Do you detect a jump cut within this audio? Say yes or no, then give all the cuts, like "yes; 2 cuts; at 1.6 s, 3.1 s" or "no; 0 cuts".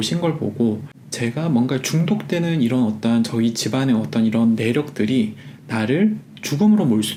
no; 0 cuts